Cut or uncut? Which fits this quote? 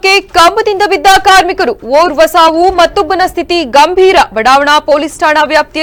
uncut